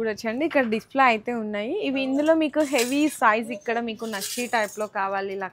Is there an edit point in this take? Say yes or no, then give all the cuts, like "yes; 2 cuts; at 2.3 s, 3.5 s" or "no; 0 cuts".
no; 0 cuts